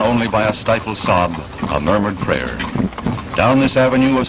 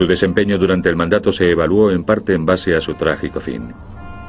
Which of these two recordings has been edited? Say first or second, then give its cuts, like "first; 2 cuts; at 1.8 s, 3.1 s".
first; 1 cut; at 1.3 s